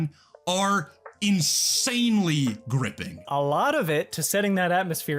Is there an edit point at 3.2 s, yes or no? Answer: yes